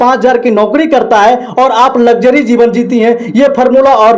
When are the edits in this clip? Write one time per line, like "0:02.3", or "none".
none